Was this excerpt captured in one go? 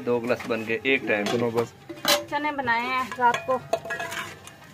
no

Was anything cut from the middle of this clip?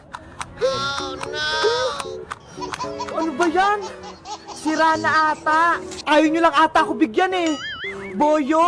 no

